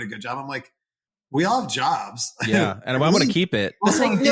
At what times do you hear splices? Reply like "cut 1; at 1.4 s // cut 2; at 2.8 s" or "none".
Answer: none